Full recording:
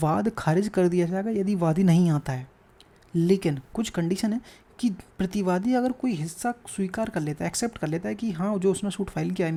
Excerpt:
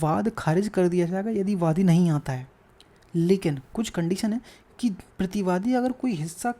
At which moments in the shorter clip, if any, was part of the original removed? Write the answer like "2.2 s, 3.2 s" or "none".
none